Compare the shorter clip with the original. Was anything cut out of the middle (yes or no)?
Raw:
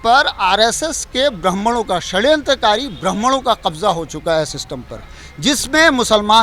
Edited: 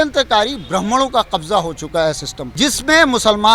yes